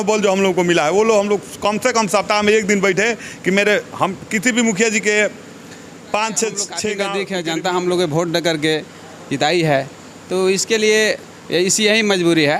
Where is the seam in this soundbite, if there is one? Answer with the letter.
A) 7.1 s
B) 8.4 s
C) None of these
A